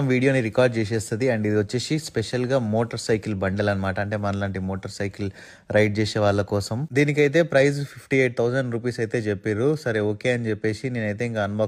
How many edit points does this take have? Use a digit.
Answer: 0